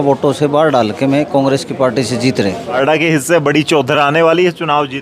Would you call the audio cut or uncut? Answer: cut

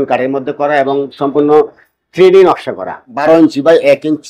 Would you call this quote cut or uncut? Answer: cut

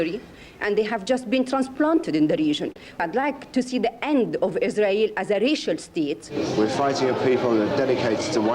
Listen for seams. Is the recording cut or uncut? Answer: cut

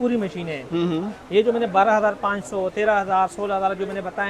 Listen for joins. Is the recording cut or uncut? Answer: uncut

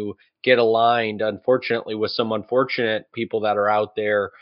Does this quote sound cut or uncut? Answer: cut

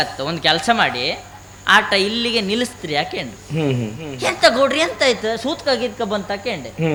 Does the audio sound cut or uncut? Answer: uncut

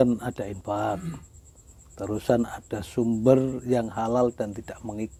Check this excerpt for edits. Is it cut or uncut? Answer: uncut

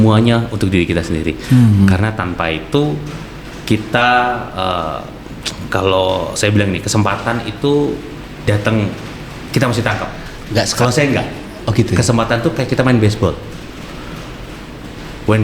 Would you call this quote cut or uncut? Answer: uncut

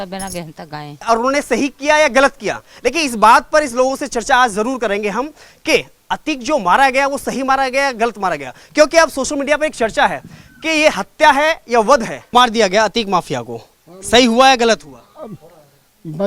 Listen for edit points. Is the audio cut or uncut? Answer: cut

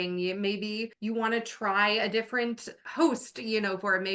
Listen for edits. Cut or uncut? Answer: cut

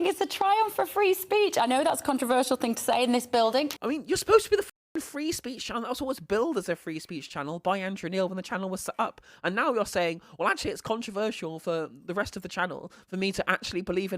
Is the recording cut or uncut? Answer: cut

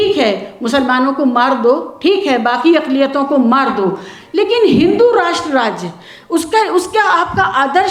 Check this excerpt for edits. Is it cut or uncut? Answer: uncut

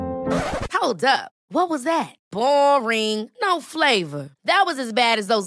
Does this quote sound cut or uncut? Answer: uncut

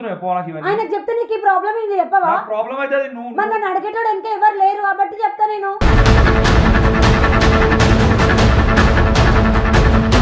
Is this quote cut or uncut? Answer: uncut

